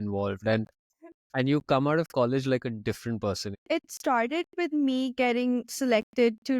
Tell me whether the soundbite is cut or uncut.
cut